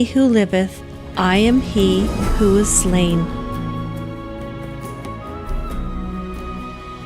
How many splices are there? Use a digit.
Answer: 1